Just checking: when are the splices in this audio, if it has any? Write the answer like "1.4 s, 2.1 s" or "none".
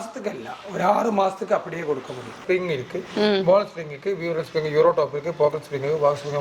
2.4 s